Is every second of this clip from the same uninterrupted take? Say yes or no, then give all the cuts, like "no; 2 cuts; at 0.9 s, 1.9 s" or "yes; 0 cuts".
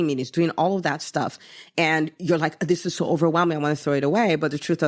yes; 0 cuts